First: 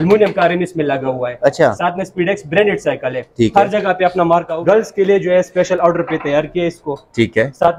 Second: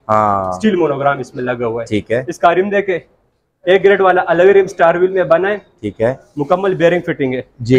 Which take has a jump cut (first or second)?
first